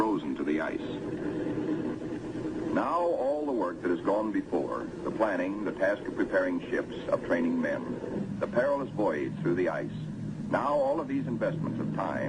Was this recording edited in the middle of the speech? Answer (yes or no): yes